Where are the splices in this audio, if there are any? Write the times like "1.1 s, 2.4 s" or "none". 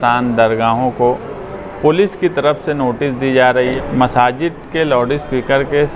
3.8 s